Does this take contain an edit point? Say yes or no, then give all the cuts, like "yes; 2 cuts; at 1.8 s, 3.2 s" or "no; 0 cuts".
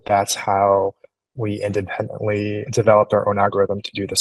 yes; 1 cut; at 2.6 s